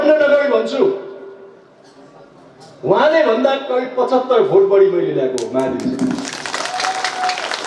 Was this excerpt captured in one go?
yes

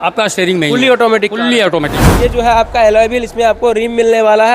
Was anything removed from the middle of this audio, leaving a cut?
yes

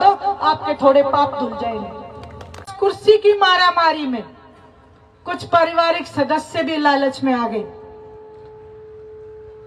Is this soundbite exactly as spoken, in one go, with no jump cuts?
no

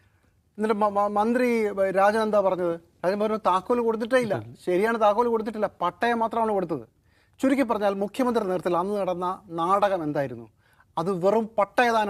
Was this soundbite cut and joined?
no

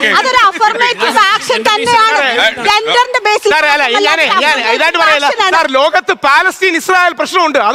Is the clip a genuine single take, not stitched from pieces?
yes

